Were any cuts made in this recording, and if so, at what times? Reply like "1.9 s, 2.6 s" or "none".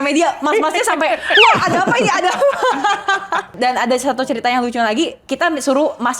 3.5 s

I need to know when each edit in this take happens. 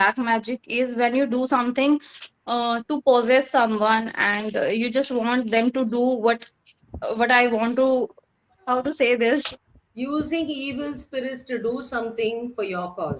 9.5 s

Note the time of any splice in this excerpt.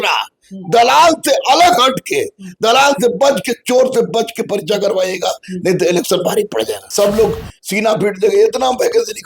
6.9 s

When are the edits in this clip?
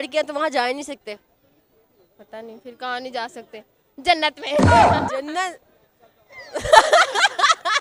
none

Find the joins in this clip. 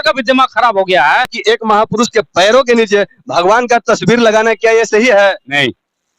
1.4 s

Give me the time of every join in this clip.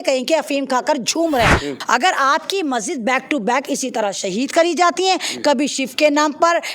1.7 s

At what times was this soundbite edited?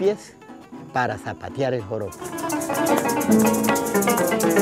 none

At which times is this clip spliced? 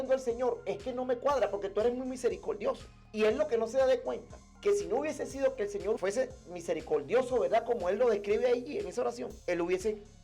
9.3 s

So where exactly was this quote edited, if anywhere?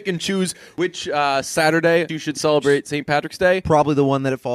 0.8 s, 2.1 s

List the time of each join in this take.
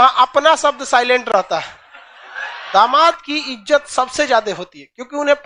2.6 s

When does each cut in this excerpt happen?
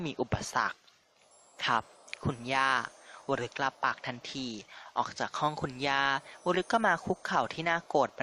none

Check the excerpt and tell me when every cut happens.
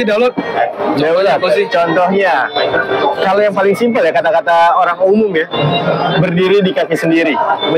none

